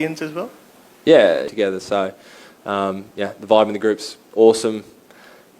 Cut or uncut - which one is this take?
cut